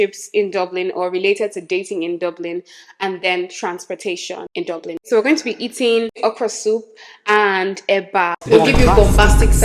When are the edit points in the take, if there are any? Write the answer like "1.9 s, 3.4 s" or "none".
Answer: 5.0 s, 8.4 s